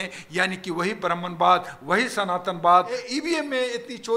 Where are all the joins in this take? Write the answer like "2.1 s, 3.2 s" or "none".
3.0 s